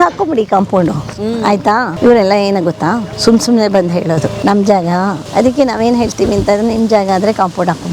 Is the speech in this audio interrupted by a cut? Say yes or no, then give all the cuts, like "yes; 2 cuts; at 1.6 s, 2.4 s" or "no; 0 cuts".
yes; 4 cuts; at 1.9 s, 3.1 s, 4.4 s, 5.2 s